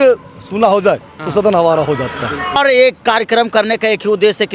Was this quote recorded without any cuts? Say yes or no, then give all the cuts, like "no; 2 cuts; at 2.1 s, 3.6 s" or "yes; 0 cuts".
no; 1 cut; at 2.6 s